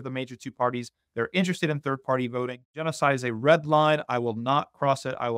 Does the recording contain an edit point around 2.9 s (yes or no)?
yes